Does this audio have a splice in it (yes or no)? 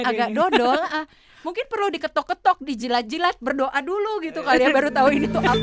no